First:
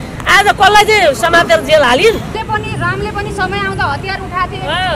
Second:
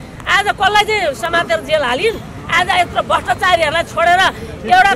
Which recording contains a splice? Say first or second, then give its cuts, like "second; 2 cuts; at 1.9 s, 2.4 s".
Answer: first; 1 cut; at 2.4 s